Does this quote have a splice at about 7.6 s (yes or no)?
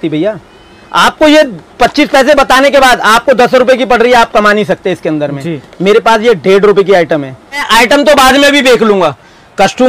yes